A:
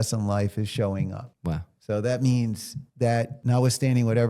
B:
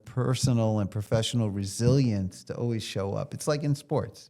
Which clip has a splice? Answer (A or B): A